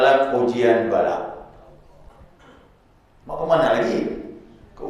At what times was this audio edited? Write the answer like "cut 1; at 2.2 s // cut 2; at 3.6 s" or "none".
cut 1; at 2.1 s

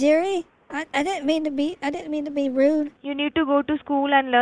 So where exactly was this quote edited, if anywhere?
cut 1; at 3.0 s

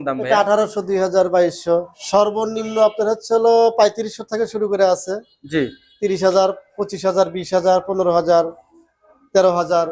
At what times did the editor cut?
cut 1; at 2.0 s

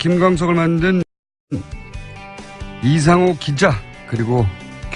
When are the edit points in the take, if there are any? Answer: none

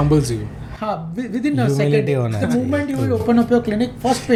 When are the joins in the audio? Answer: none

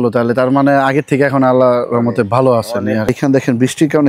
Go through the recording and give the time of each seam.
cut 1; at 3.1 s

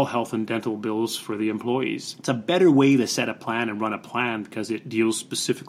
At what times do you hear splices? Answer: cut 1; at 2.1 s

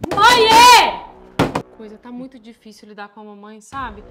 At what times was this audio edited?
cut 1; at 1.7 s

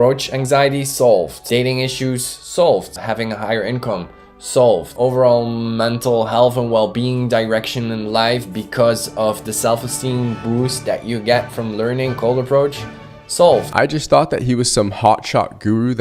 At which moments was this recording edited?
cut 1; at 1.4 s // cut 2; at 3.0 s // cut 3; at 13.7 s

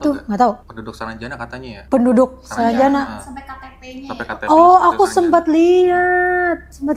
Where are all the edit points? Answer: none

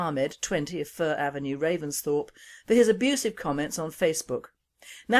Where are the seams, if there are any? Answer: cut 1; at 0.9 s

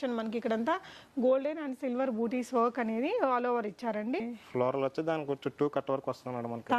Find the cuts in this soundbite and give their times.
cut 1; at 4.4 s

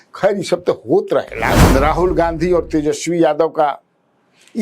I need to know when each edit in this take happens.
cut 1; at 1.6 s

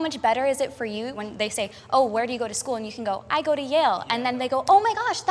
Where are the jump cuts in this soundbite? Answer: cut 1; at 1.2 s

